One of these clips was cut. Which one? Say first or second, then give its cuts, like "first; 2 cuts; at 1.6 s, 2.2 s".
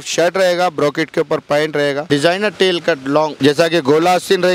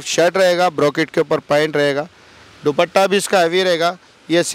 first; 2 cuts; at 2.0 s, 3.3 s